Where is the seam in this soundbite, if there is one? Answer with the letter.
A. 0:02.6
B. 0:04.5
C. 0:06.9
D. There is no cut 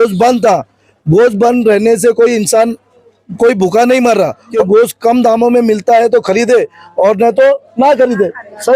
B